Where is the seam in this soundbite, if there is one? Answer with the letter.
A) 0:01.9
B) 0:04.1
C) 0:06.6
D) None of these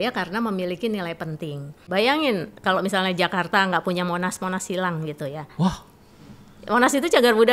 A